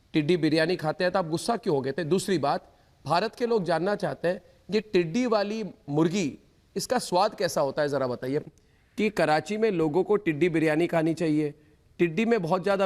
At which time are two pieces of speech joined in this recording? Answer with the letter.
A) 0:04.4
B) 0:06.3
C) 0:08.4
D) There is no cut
C